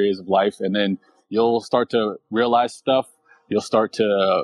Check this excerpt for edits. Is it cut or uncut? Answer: uncut